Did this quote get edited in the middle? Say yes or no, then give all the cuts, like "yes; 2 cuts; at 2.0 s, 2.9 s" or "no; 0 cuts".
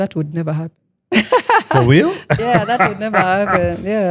no; 0 cuts